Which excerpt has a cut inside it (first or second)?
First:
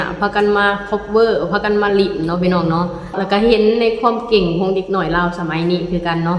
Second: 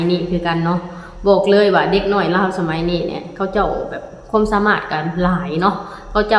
first